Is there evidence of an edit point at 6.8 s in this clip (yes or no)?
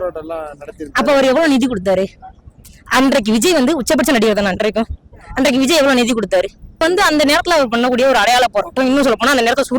yes